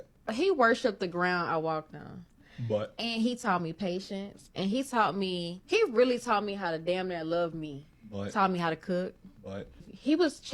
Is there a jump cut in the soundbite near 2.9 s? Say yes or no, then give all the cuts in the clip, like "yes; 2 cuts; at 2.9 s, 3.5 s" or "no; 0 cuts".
no; 1 cut; at 5.8 s